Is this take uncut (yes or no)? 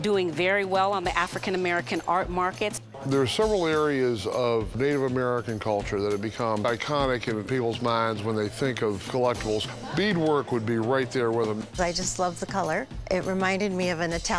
no